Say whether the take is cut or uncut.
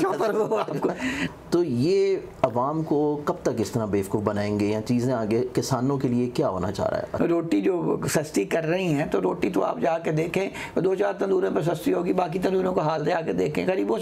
cut